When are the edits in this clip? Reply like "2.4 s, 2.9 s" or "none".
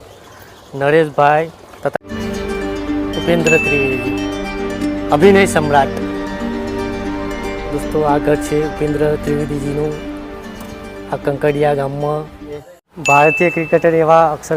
1.9 s, 12.7 s